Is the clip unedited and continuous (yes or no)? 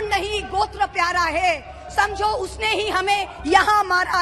yes